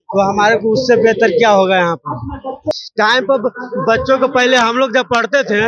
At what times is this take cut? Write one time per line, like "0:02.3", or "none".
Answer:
0:02.9